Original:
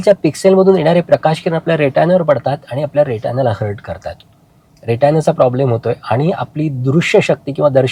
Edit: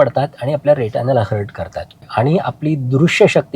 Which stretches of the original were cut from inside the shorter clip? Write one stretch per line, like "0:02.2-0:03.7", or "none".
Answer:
0:04.4-0:06.0